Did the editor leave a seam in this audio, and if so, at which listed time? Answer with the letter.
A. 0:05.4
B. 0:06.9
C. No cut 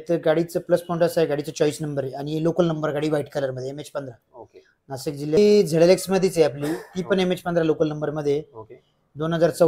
A